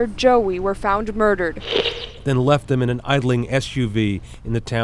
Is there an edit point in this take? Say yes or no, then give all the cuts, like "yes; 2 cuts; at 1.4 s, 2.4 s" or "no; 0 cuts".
no; 0 cuts